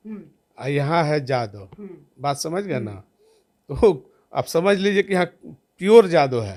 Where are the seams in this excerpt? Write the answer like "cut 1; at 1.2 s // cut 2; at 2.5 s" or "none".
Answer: none